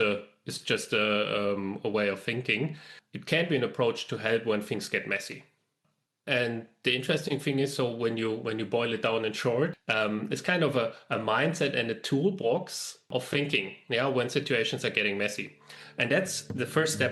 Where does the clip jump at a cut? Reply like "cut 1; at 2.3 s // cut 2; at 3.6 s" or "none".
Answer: cut 1; at 2.7 s // cut 2; at 9.8 s // cut 3; at 13.1 s